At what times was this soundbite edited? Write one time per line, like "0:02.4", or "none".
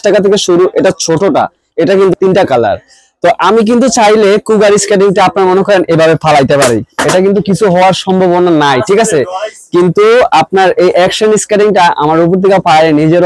0:02.1